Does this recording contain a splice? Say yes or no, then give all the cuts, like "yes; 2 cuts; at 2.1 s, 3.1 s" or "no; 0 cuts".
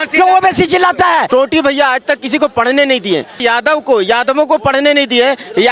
yes; 2 cuts; at 1.3 s, 3.4 s